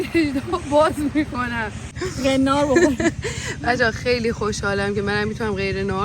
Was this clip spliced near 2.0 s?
yes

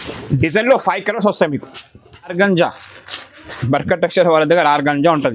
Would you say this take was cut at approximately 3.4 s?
no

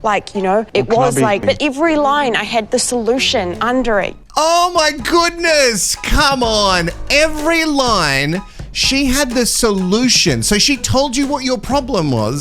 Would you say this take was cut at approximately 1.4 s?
yes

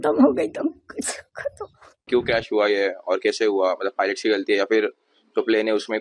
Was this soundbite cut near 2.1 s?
yes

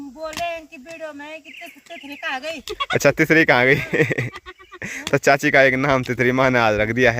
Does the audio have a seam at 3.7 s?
no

